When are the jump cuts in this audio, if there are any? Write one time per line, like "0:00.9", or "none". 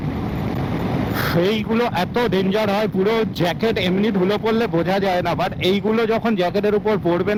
none